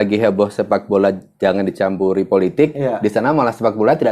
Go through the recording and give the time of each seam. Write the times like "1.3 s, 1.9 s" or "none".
none